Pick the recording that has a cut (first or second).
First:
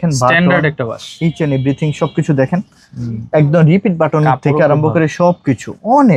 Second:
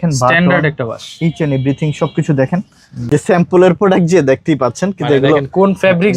second